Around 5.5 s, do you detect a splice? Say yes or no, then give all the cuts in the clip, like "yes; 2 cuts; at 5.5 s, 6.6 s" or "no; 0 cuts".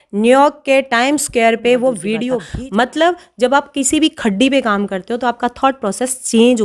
no; 1 cut; at 2.4 s